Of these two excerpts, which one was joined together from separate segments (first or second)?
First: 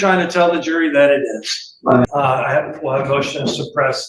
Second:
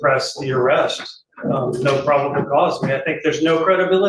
first